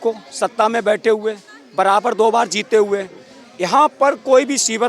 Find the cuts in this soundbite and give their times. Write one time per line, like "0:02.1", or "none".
none